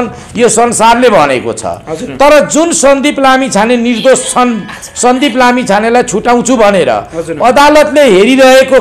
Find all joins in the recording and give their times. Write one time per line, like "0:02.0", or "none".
none